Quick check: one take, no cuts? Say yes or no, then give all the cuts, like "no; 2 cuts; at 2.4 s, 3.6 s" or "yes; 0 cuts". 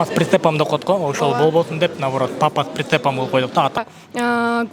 no; 1 cut; at 3.8 s